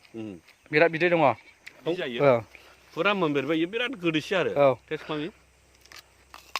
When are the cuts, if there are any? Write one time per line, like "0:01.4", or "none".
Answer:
0:01.9